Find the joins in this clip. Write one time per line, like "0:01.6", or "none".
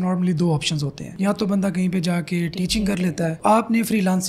0:03.4